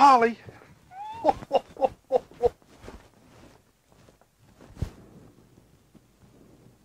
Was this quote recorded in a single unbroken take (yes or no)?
yes